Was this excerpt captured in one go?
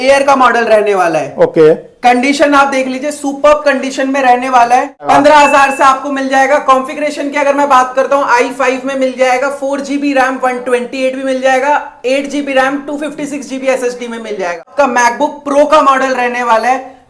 no; 2 cuts; at 5.1 s, 14.7 s

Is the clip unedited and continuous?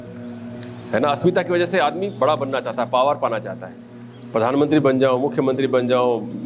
yes; 0 cuts

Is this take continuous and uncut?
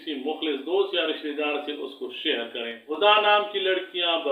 no; 1 cut; at 2.8 s

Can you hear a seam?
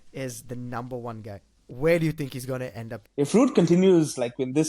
yes; 2 cuts; at 1.5 s, 3.0 s

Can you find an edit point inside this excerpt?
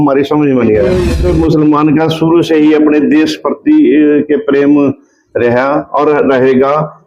yes; 1 cut; at 1.0 s

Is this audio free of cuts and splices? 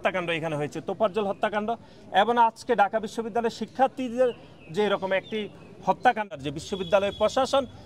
no; 1 cut; at 6.4 s

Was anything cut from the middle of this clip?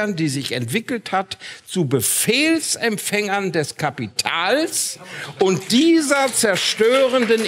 no; 0 cuts

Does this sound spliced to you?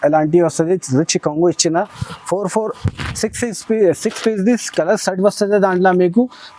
no; 0 cuts

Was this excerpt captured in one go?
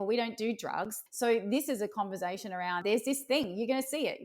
no; 2 cuts; at 1.0 s, 2.8 s

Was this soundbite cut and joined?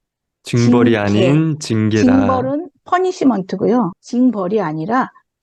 no; 0 cuts

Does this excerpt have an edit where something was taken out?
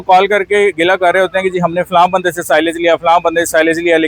no; 0 cuts

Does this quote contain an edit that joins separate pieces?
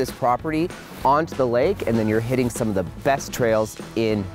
no; 0 cuts

